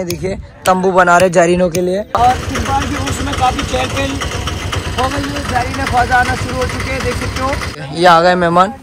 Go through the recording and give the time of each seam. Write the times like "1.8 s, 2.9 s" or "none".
2.2 s, 7.8 s